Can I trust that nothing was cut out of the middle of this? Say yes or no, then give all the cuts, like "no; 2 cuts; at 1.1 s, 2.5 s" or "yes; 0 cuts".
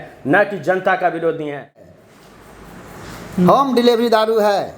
no; 1 cut; at 1.9 s